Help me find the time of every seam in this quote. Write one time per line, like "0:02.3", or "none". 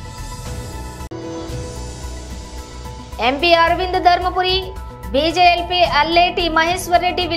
0:00.9
0:03.2